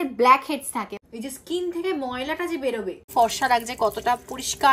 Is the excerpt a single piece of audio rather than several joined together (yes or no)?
no